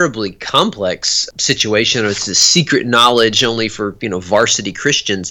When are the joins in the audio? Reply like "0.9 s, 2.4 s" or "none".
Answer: 1.2 s